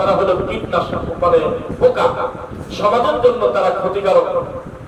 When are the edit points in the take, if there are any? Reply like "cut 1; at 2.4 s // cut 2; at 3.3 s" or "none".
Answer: none